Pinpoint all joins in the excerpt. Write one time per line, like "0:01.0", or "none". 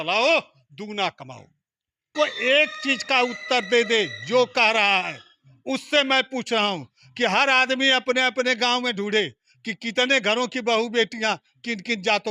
0:02.1